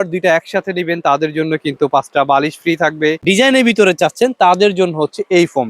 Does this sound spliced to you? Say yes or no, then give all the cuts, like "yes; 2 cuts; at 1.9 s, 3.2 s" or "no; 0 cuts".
yes; 1 cut; at 3.2 s